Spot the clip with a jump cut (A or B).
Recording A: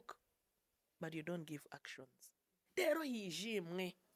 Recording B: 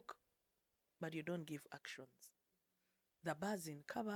A